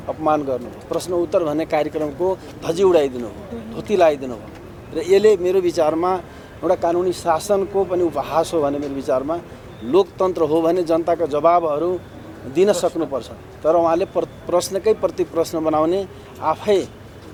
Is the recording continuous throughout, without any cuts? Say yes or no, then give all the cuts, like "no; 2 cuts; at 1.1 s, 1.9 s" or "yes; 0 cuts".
yes; 0 cuts